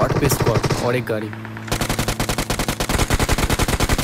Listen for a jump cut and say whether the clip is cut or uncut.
uncut